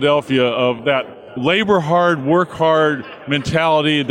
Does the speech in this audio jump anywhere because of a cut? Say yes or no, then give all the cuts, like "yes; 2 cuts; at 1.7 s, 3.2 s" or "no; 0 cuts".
yes; 1 cut; at 1.3 s